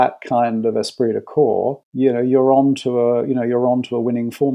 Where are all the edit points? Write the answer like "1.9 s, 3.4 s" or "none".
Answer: 1.8 s